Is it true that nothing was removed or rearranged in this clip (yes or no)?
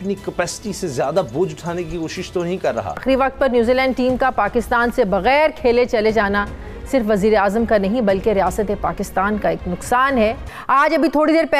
no